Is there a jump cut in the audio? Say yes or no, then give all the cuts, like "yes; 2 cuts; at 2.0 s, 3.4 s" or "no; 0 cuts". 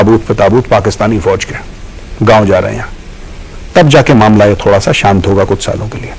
no; 0 cuts